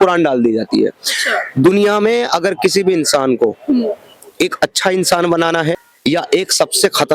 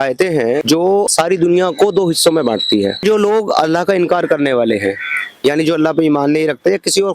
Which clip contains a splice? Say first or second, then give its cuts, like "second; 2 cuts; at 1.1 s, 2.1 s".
second; 2 cuts; at 1.0 s, 3.0 s